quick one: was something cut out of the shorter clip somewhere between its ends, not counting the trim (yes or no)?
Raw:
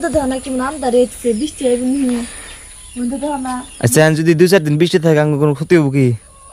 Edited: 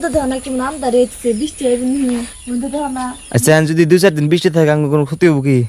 yes